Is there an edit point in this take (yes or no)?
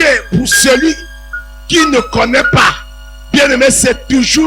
no